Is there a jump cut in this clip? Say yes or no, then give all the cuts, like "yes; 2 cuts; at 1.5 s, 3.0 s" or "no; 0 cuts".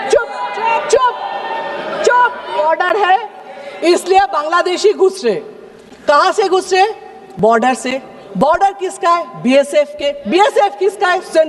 yes; 1 cut; at 2.6 s